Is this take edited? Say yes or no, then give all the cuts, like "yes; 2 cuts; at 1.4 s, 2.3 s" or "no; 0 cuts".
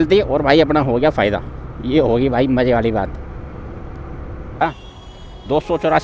yes; 1 cut; at 4.6 s